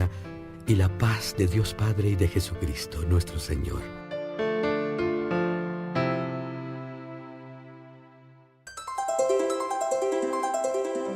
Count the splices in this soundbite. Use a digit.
1